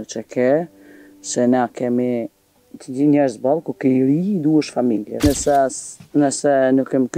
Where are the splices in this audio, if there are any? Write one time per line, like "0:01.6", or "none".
0:05.2